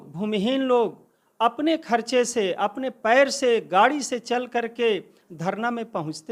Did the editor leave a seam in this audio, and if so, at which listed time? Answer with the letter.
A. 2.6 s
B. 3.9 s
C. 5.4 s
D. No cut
D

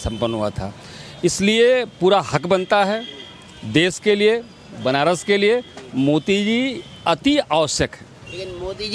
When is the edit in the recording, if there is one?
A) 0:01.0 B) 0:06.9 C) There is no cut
C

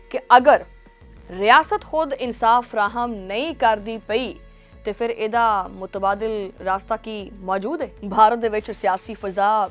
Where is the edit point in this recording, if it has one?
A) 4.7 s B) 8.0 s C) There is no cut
B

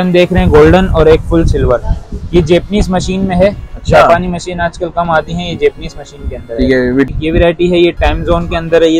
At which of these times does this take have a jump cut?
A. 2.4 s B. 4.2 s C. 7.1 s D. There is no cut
C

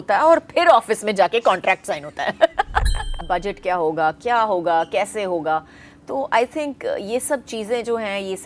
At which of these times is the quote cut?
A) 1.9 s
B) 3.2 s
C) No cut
B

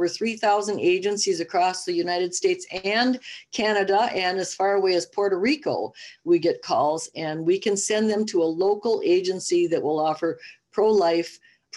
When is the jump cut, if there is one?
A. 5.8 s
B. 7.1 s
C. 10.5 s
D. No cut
D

